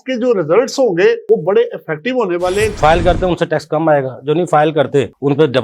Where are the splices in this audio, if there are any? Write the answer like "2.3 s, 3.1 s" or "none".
2.8 s